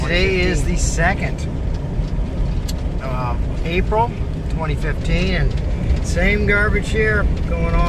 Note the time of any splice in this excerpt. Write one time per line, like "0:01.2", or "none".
none